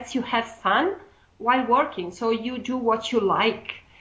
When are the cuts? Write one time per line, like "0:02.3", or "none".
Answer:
0:01.2

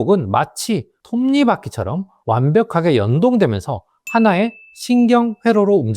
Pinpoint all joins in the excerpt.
0:01.0
0:02.1

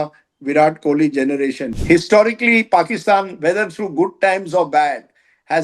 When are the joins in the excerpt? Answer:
0:01.6

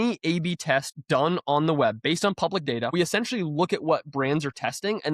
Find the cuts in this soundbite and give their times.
0:02.9

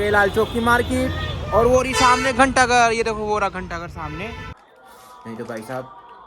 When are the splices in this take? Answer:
0:04.6

